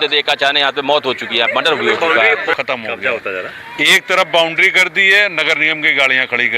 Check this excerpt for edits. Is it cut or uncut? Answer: cut